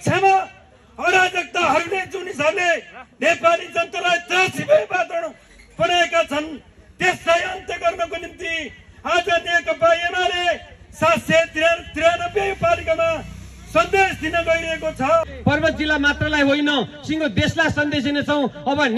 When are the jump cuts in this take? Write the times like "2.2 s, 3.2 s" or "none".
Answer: 15.3 s